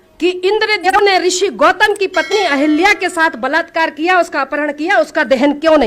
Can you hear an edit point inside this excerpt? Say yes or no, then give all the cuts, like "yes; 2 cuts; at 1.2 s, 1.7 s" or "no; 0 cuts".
yes; 1 cut; at 0.9 s